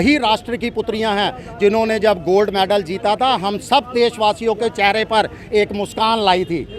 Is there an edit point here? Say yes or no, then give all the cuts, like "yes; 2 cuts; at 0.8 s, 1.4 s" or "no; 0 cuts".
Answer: no; 0 cuts